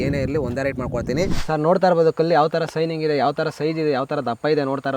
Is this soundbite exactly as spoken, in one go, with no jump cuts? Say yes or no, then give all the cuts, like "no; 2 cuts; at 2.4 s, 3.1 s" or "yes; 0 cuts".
no; 1 cut; at 1.4 s